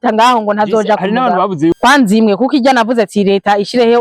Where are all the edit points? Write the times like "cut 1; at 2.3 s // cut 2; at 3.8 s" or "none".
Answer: cut 1; at 1.7 s